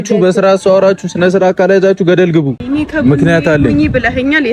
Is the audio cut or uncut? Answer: cut